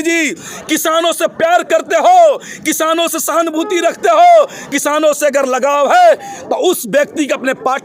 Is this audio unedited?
yes; 0 cuts

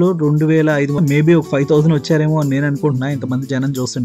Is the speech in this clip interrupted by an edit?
yes; 1 cut; at 1.0 s

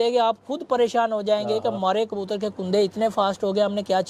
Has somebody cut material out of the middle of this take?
no; 0 cuts

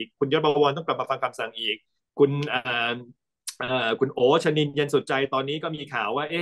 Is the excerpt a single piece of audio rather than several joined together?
yes; 0 cuts

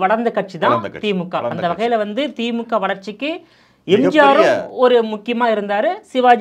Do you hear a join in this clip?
no; 0 cuts

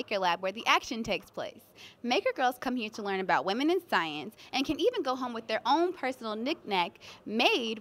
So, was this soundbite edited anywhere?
no; 0 cuts

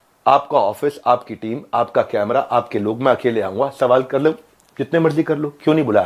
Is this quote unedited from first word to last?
yes; 0 cuts

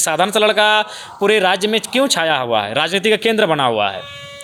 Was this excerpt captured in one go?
yes; 0 cuts

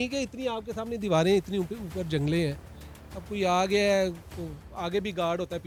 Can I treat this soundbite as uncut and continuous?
yes; 0 cuts

